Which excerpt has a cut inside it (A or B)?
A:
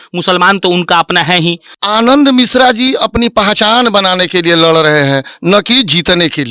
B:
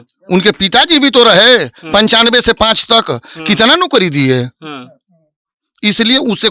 A